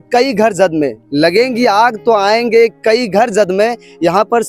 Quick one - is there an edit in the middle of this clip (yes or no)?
no